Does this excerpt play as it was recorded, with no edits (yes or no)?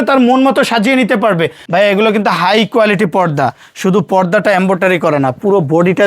no